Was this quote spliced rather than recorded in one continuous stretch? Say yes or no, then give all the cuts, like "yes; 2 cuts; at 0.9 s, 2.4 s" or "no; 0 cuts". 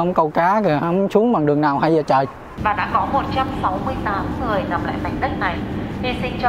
yes; 1 cut; at 2.5 s